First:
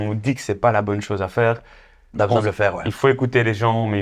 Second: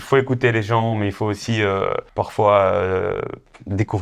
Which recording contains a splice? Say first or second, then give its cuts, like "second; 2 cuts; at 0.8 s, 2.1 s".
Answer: second; 1 cut; at 2.1 s